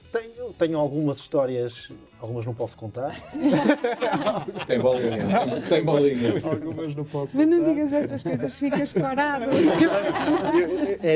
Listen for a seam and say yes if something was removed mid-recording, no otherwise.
no